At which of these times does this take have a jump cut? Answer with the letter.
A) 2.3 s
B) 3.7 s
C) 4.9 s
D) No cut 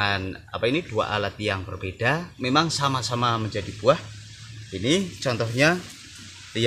A